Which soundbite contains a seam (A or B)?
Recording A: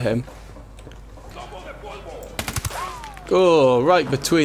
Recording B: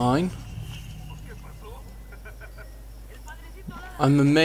A